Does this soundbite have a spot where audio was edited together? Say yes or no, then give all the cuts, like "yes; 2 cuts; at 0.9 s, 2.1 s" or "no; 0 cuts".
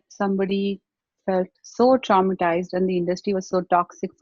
no; 0 cuts